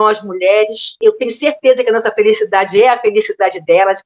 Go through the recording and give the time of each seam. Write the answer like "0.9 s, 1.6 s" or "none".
1.0 s